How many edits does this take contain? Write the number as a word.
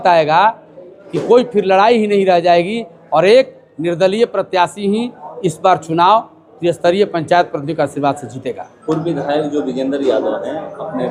zero